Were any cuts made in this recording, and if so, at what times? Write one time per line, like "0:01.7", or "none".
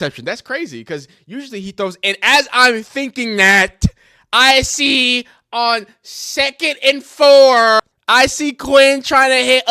0:07.9